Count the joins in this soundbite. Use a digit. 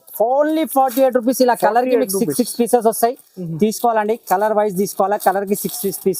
0